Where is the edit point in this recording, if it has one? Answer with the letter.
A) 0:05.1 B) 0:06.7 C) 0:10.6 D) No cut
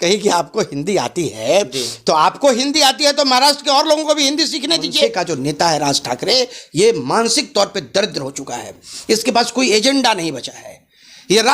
A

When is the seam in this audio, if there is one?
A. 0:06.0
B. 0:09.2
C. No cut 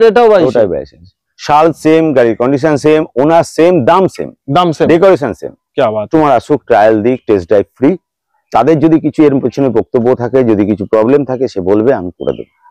A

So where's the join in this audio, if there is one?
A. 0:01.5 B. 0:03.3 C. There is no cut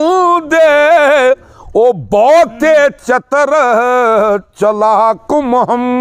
C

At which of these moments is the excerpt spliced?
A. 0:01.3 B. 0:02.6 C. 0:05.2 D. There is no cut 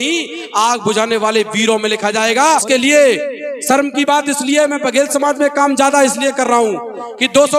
B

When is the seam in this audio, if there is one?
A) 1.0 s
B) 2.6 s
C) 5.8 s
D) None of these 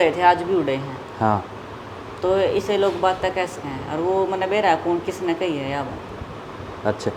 D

